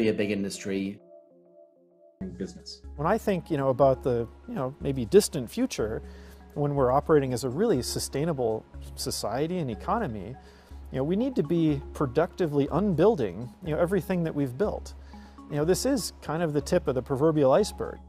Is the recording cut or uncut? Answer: cut